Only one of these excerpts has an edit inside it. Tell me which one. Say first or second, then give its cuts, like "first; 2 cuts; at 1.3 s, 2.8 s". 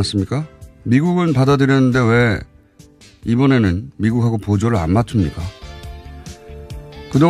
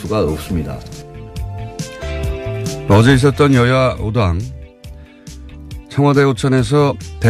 first; 1 cut; at 0.9 s